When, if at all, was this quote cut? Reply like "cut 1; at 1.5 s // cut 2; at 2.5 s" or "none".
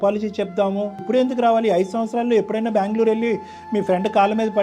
cut 1; at 1.0 s